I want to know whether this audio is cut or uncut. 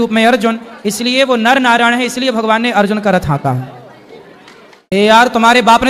cut